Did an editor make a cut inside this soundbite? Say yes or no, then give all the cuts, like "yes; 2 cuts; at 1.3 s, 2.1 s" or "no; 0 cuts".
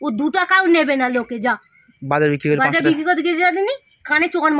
no; 0 cuts